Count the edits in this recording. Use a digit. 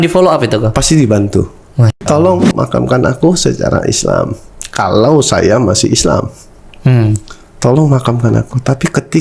1